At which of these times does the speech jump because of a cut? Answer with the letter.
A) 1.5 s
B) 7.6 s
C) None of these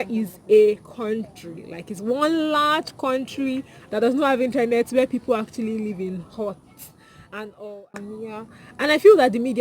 B